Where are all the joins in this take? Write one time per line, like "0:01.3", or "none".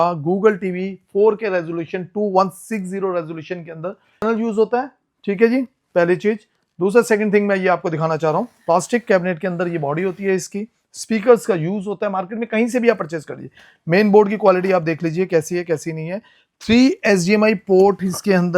0:04.2